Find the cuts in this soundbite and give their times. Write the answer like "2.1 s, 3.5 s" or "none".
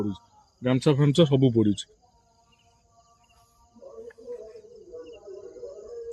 none